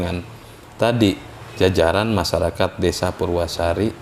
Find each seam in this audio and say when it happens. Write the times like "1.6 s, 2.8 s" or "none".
none